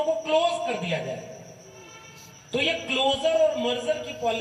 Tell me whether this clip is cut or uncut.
uncut